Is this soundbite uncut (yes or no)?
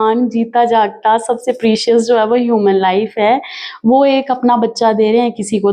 yes